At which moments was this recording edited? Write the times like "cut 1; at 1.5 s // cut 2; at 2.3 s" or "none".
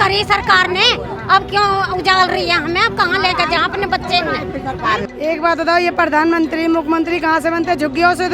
cut 1; at 5.0 s